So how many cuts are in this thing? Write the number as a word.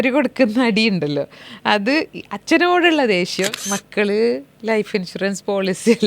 one